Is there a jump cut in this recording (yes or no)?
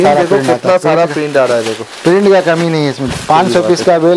no